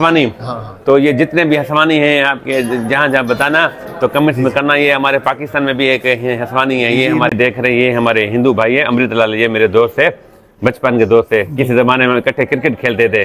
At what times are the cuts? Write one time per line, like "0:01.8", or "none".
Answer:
0:07.3